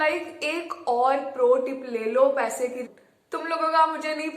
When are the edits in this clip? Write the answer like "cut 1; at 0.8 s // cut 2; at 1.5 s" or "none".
cut 1; at 2.8 s